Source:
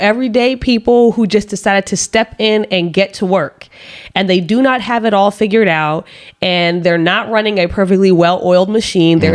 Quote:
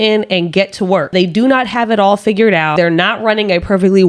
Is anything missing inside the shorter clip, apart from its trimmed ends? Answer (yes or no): yes